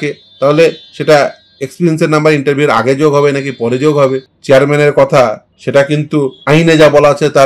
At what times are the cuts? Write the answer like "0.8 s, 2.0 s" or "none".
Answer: 4.3 s, 5.5 s, 6.4 s